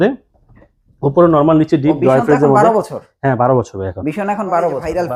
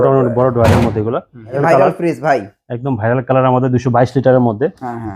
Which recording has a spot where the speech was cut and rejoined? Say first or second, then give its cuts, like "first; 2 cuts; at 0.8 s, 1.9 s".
second; 1 cut; at 1.6 s